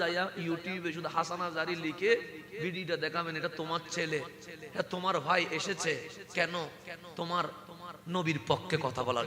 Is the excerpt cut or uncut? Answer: uncut